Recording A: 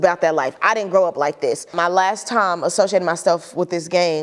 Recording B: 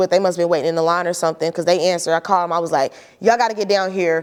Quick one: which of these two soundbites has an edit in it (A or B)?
A